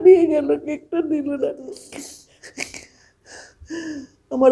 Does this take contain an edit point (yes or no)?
yes